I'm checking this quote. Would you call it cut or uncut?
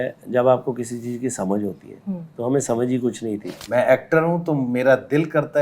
cut